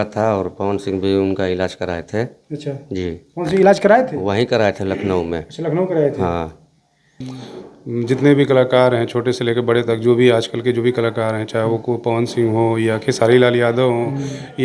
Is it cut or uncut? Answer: cut